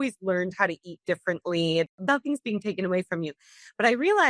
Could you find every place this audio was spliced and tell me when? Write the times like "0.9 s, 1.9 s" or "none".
2.0 s